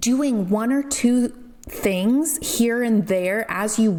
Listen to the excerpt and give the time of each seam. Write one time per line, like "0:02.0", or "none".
none